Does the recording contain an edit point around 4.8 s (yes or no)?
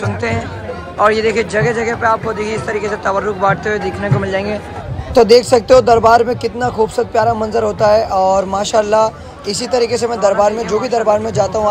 no